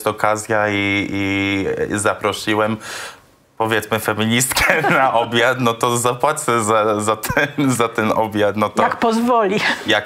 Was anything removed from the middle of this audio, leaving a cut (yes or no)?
no